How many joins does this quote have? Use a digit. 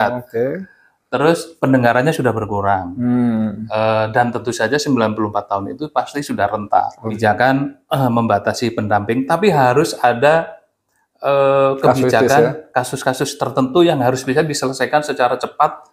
1